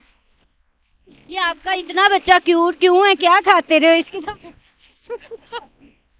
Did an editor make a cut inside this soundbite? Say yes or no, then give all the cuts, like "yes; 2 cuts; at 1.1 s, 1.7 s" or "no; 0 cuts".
yes; 1 cut; at 1.2 s